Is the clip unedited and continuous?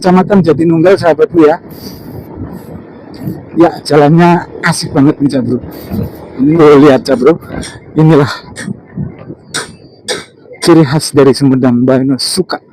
no; 1 cut; at 6.6 s

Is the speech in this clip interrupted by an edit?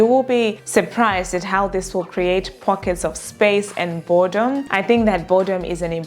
yes; 1 cut; at 4.7 s

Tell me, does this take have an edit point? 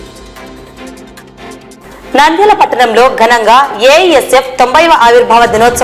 yes; 1 cut; at 1.8 s

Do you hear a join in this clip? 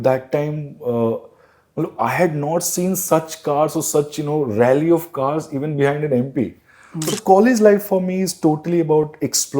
yes; 1 cut; at 7.1 s

